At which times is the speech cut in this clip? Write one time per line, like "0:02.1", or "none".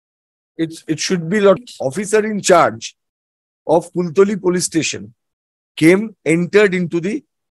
0:01.6